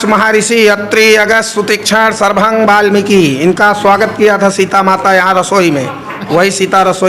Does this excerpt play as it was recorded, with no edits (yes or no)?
yes